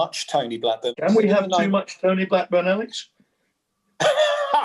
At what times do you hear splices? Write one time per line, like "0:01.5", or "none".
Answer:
0:01.0